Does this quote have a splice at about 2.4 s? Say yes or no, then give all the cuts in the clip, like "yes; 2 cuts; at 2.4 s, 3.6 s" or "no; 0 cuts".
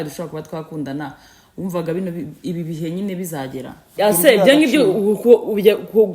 no; 1 cut; at 3.9 s